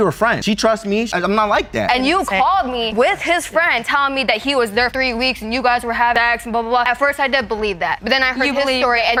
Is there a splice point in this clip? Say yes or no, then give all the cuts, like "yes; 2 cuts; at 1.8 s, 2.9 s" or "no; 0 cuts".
no; 0 cuts